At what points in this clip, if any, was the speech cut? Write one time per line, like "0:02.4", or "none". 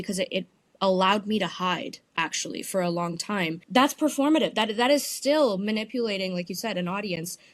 0:03.6